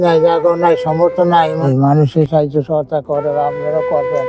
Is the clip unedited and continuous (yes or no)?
no